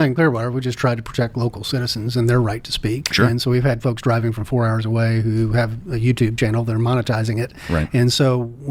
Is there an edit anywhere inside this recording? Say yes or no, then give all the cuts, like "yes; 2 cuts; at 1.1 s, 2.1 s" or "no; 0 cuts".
no; 0 cuts